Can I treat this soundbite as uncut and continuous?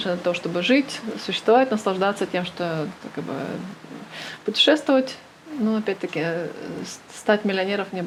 yes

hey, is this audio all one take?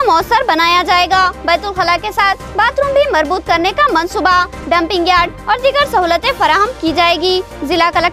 yes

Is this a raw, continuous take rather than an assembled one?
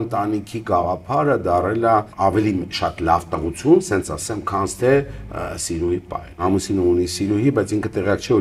no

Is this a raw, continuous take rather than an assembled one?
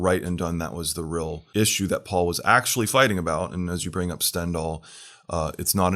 no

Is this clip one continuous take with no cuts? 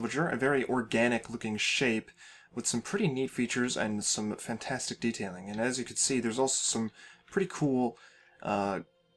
no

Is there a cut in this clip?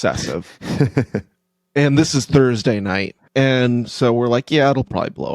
yes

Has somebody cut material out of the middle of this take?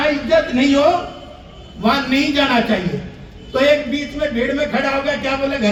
no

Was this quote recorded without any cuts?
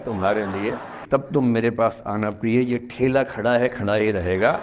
no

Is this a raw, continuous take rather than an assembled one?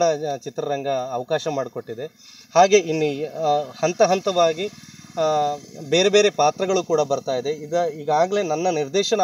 yes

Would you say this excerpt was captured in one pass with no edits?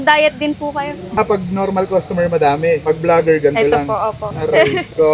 no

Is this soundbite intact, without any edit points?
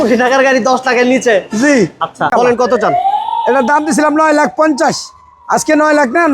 no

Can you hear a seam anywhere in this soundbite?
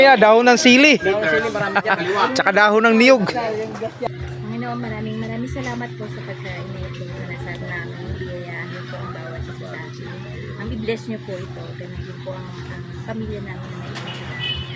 yes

